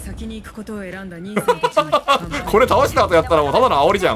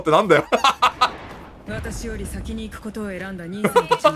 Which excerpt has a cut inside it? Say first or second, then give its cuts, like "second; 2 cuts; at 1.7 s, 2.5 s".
second; 1 cut; at 1.1 s